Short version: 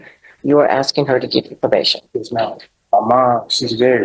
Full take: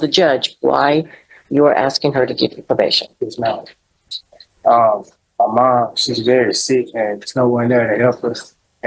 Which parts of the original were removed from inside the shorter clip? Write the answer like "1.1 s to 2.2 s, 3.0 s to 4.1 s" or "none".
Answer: 3.8 s to 5.2 s